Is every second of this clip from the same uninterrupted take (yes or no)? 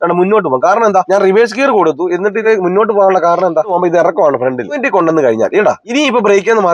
no